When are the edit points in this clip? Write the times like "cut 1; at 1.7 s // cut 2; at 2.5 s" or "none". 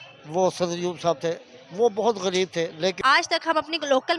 cut 1; at 3.0 s